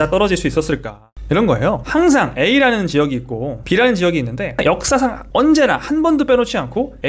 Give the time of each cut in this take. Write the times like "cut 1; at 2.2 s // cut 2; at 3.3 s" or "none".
cut 1; at 1.1 s // cut 2; at 4.6 s